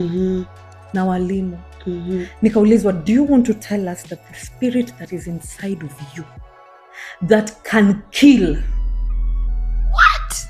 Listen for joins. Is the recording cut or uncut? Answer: uncut